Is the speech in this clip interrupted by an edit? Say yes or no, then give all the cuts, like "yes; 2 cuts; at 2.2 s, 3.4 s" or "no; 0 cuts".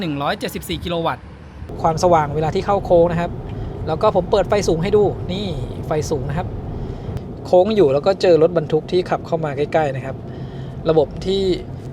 yes; 2 cuts; at 1.6 s, 7.1 s